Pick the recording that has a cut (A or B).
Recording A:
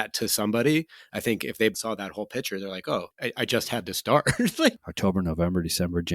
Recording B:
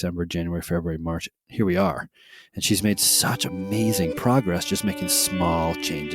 A